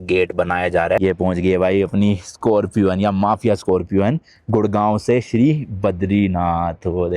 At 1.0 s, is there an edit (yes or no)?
yes